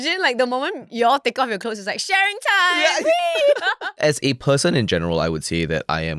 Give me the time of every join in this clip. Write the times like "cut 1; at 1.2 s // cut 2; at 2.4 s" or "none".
cut 1; at 4.0 s